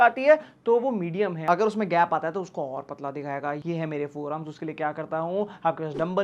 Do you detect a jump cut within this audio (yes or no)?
yes